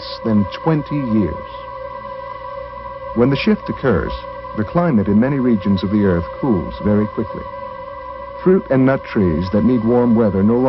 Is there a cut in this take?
yes; 1 cut; at 4.6 s

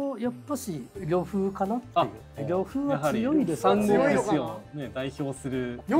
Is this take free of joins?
no; 2 cuts; at 0.9 s, 2.4 s

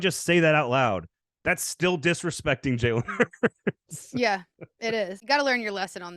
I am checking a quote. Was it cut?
yes; 1 cut; at 5.2 s

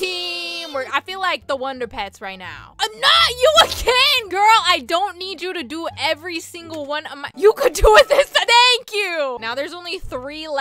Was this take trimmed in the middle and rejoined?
yes; 1 cut; at 9.4 s

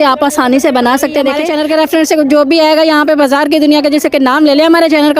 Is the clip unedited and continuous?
no; 1 cut; at 1.5 s

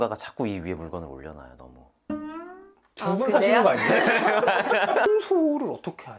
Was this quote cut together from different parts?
yes; 1 cut; at 5.1 s

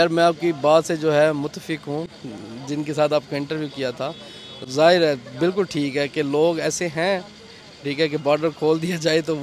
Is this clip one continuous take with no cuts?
yes; 0 cuts

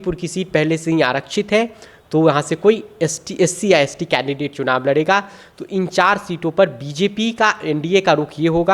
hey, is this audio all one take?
yes; 0 cuts

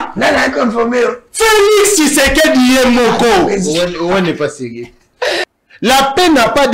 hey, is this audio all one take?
no; 1 cut; at 5.4 s

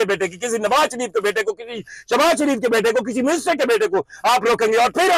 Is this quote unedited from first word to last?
yes; 0 cuts

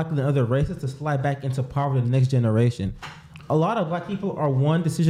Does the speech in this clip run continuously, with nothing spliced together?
yes; 0 cuts

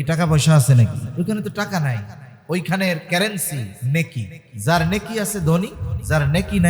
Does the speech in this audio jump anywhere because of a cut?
yes; 2 cuts; at 1.0 s, 3.7 s

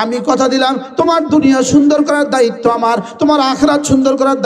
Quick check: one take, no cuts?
yes; 0 cuts

